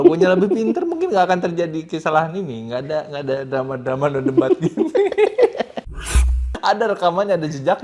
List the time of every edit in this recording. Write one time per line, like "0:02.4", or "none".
0:06.1